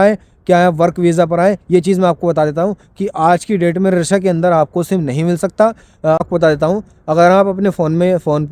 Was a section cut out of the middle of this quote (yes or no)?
yes